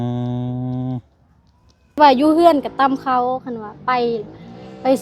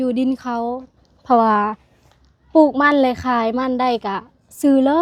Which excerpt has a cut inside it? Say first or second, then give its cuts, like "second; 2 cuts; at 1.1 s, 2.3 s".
first; 1 cut; at 2.0 s